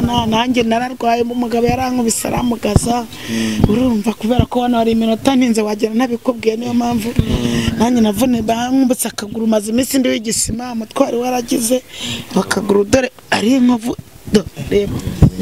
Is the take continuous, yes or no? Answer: yes